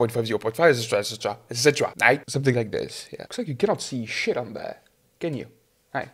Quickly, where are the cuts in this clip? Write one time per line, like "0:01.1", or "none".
none